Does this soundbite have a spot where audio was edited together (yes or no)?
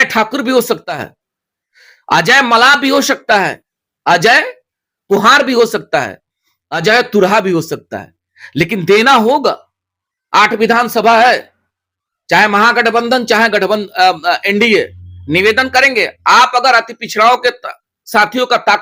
no